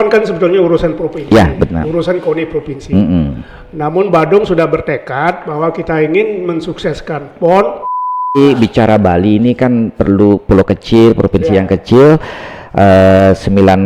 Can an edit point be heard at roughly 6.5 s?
no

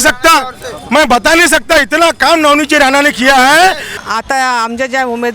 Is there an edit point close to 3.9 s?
yes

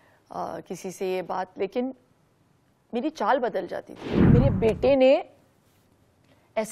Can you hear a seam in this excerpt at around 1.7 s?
no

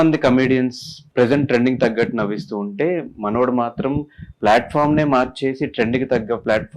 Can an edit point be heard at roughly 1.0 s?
yes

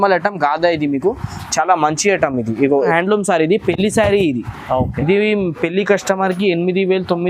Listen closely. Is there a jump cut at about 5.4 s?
no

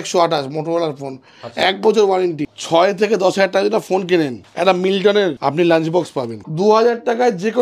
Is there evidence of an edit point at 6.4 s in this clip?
yes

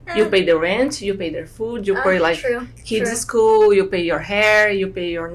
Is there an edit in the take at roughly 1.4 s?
no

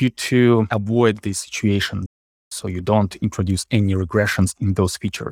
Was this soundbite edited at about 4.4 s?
no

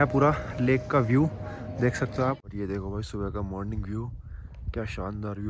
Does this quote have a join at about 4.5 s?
no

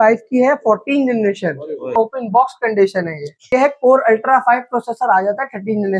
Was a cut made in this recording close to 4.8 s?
no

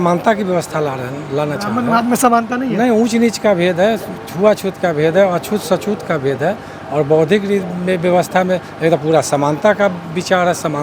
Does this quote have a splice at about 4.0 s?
no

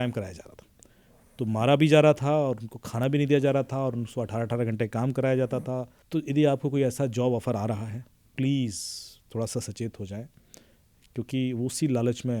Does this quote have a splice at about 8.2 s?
yes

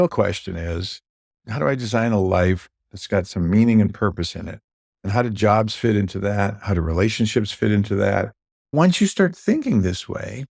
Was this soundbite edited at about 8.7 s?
yes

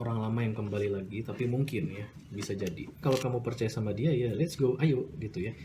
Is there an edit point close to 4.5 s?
no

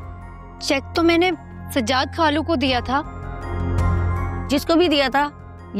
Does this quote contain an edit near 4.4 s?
yes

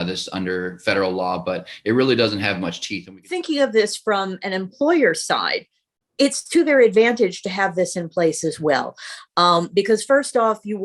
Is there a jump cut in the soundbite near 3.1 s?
yes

